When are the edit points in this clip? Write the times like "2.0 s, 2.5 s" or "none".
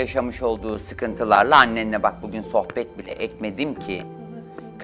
none